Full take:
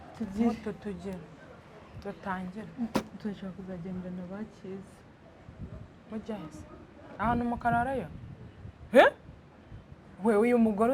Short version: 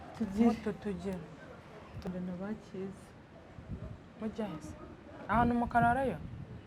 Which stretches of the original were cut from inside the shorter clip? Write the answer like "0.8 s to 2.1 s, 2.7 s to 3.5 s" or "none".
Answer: 2.1 s to 4.0 s